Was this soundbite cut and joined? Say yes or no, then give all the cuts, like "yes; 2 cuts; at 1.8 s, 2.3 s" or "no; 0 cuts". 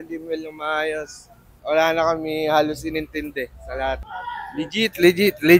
yes; 2 cuts; at 1.5 s, 4.1 s